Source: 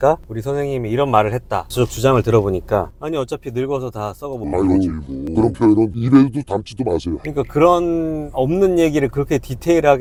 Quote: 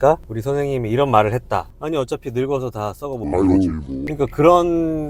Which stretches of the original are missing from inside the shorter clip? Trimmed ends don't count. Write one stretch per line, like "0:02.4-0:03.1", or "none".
0:01.7-0:02.9
0:05.2-0:07.2